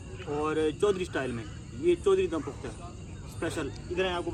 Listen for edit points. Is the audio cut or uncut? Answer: uncut